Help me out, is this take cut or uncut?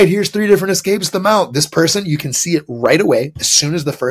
uncut